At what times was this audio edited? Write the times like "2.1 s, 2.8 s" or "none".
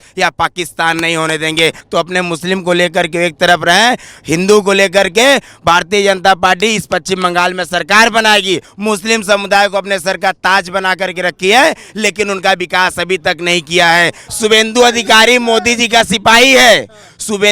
1.8 s, 8.7 s, 14.2 s

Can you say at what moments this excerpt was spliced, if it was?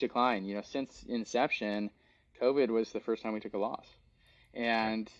none

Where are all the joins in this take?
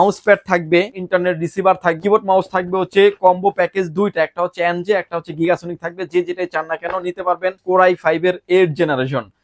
1.0 s, 2.0 s, 7.6 s

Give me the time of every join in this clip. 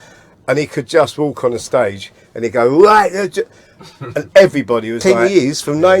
5.0 s

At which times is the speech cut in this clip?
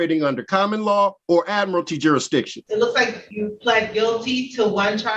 1.2 s, 2.6 s, 3.2 s

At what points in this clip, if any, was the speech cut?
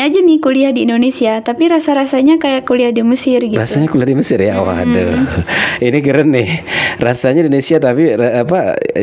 none

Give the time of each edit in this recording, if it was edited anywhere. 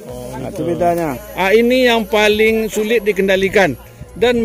1.2 s

